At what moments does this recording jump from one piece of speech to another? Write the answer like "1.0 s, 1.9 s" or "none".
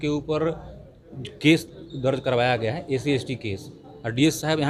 none